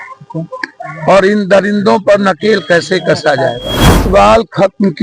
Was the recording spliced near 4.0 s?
yes; 1 cut; at 4.0 s

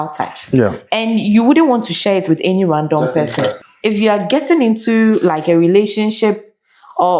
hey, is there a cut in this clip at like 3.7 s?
yes; 1 cut; at 3.7 s

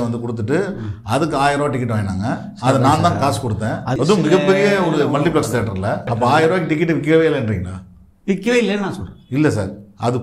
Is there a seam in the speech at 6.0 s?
yes; 2 cuts; at 3.9 s, 6.0 s

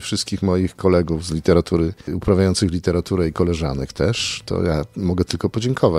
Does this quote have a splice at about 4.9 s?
no; 1 cut; at 2.1 s

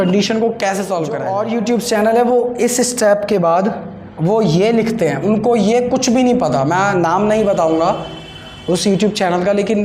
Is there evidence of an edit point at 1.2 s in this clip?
yes; 1 cut; at 1.2 s

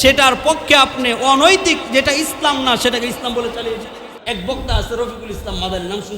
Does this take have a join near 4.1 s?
yes; 1 cut; at 4.1 s

